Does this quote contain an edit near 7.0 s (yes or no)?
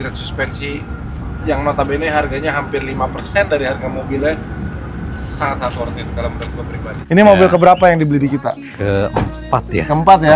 yes